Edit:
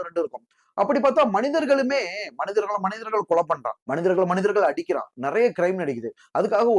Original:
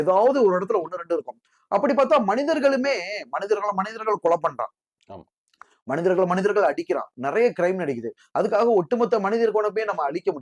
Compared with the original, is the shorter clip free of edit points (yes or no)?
no